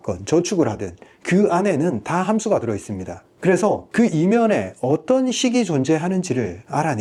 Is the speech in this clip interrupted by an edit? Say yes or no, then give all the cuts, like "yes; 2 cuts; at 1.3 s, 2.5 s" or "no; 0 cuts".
no; 0 cuts